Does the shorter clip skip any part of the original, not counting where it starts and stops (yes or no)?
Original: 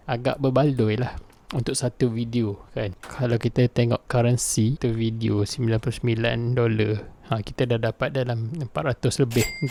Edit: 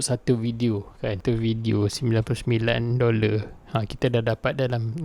yes